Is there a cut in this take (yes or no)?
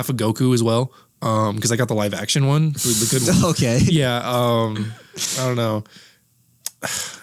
no